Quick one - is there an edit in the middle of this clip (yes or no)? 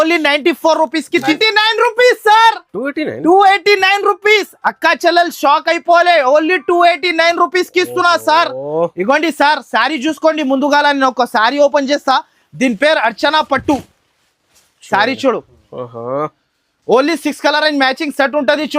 yes